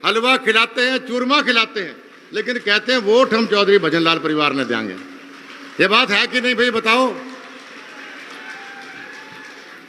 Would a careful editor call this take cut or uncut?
uncut